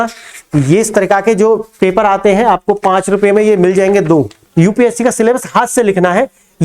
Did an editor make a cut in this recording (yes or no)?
yes